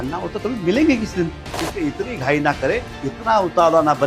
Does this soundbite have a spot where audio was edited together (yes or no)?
yes